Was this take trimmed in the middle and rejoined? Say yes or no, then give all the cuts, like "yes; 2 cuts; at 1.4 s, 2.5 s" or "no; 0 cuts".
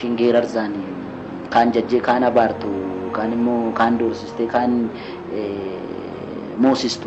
no; 0 cuts